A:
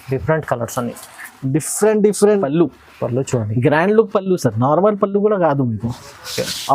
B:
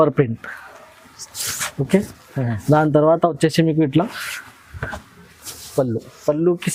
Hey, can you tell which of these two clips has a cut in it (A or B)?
A